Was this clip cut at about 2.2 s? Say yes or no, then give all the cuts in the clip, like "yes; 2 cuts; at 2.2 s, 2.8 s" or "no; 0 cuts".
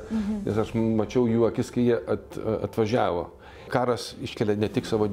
no; 1 cut; at 3.6 s